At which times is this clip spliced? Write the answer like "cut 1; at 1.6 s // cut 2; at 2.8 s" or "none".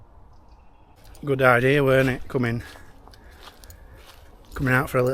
cut 1; at 1.0 s